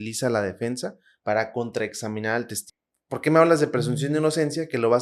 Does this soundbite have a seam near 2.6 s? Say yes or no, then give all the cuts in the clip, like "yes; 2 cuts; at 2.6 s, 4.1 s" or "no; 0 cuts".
yes; 1 cut; at 2.6 s